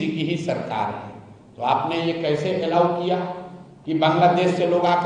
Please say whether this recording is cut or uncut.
uncut